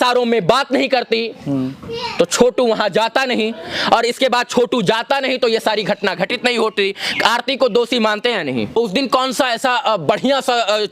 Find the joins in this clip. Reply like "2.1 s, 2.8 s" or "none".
8.8 s